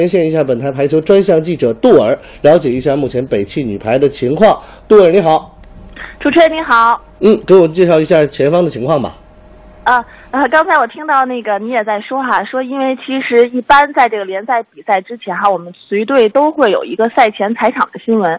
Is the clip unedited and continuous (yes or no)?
yes